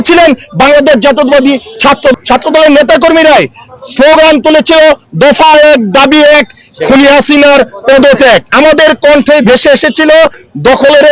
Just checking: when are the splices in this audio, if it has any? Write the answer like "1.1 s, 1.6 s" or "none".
2.1 s, 8.5 s